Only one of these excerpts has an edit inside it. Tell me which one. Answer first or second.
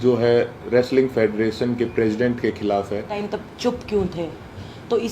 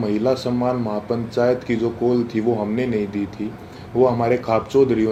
first